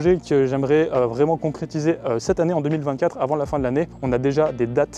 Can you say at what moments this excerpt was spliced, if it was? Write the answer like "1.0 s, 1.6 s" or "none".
none